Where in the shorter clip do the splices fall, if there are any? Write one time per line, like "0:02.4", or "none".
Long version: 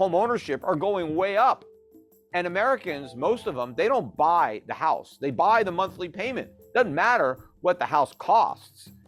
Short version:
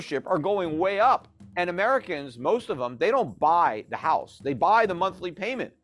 0:01.4

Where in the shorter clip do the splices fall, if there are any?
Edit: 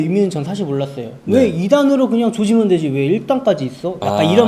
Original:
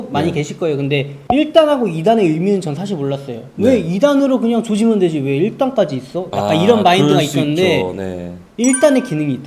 none

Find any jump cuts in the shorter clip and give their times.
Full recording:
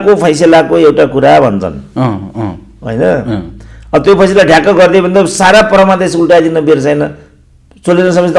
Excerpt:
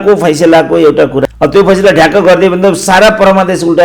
0:01.2

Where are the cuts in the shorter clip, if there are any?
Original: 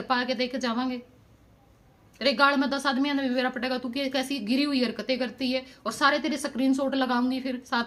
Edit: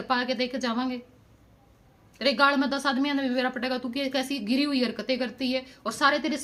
none

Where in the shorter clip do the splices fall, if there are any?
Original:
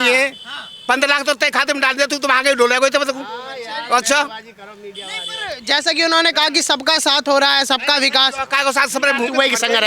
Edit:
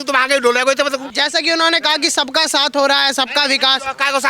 0:01.1

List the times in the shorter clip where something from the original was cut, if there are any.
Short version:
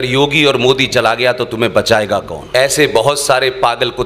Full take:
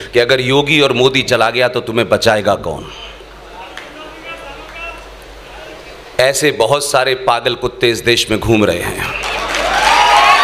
0:02.4

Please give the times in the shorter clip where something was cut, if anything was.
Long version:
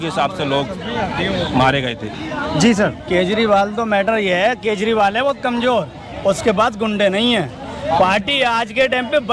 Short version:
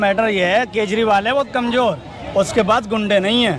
none

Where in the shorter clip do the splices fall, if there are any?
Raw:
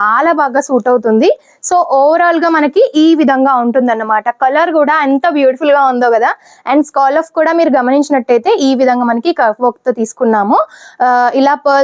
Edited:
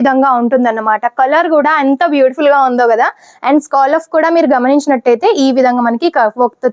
none

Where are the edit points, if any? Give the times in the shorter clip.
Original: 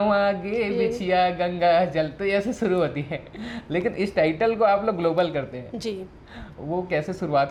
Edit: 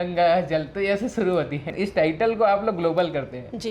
0:01.7

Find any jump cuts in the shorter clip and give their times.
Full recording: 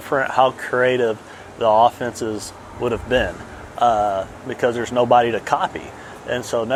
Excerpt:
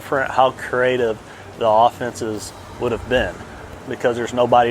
0:03.7

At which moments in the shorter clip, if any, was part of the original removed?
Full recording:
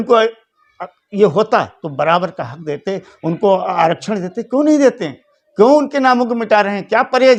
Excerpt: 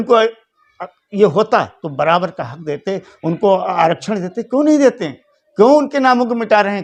none

